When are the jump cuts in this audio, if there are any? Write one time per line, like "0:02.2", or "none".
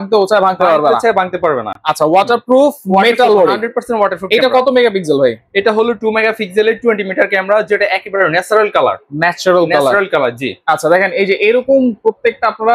none